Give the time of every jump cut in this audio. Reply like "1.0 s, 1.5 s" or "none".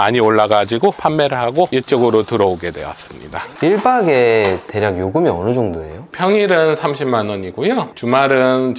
1.0 s, 3.4 s